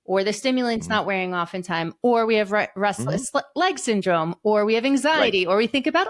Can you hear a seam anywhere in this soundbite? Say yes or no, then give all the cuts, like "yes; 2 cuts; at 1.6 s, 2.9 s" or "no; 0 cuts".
no; 0 cuts